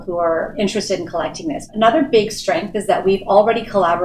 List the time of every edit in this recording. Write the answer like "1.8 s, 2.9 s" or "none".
1.6 s